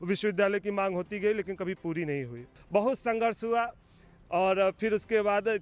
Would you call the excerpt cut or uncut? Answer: cut